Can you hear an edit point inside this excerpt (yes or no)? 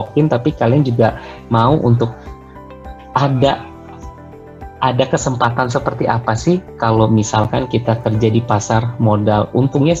no